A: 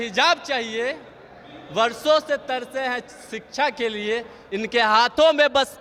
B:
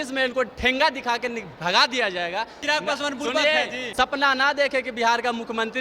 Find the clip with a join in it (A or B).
B